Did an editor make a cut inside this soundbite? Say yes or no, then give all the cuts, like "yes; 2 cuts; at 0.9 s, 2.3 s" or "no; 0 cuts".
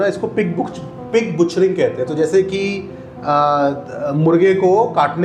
no; 0 cuts